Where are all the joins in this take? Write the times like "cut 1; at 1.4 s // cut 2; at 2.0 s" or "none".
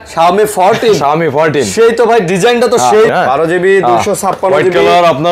cut 1; at 3.1 s

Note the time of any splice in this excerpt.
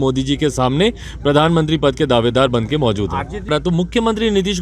cut 1; at 3.5 s

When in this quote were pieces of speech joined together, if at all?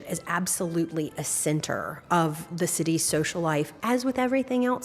cut 1; at 3.7 s

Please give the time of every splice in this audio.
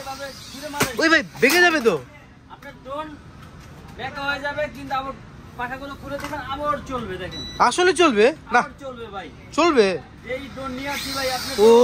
none

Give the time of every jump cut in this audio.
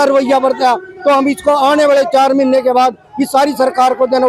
none

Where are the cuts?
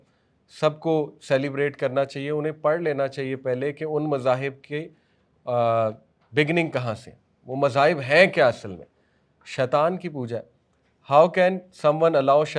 none

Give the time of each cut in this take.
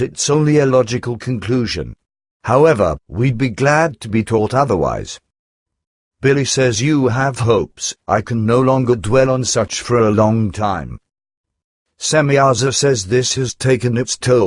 none

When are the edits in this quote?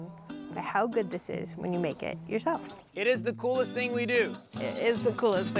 cut 1; at 2.8 s // cut 2; at 4.5 s

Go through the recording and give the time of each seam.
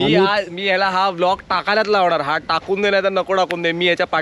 none

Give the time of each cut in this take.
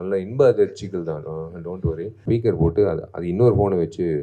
cut 1; at 2.2 s

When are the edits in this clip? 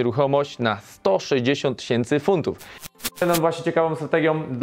cut 1; at 2.9 s

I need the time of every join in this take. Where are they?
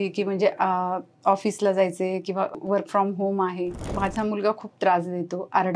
cut 1; at 2.5 s // cut 2; at 3.9 s

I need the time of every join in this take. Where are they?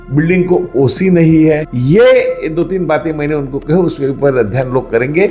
cut 1; at 1.6 s

